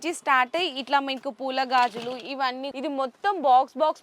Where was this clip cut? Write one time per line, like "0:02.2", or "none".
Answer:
0:02.7